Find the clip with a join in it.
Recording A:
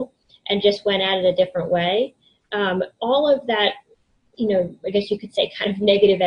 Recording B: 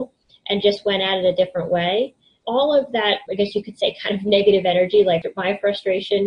B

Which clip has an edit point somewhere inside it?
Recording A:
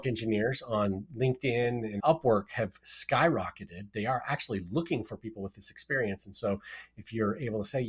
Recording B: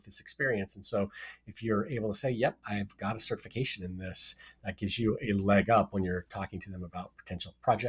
A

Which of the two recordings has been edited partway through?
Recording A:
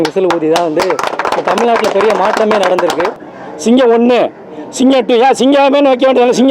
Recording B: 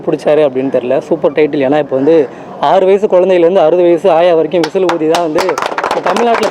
A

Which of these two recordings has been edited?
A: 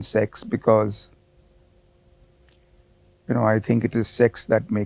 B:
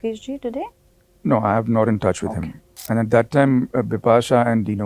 B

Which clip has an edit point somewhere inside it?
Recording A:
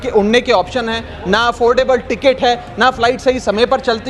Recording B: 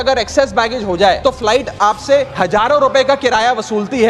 B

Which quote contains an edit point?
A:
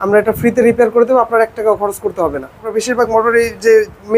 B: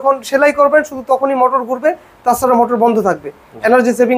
A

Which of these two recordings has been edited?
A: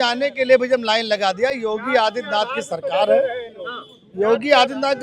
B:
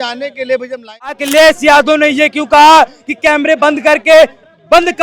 B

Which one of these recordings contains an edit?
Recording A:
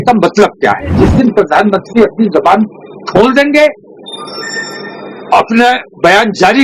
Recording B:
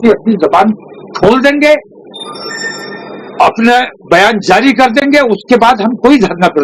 A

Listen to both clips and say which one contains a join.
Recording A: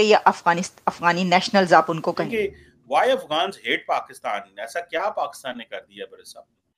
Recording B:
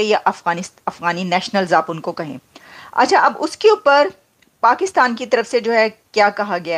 A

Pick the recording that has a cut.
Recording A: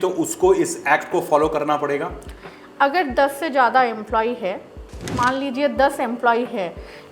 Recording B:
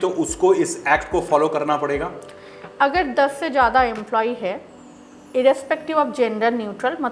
A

